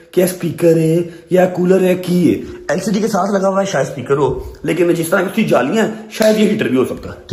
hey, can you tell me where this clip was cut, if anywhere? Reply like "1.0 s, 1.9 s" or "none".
none